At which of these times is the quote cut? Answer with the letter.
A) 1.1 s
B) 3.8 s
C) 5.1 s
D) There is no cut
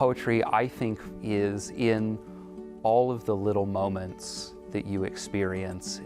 A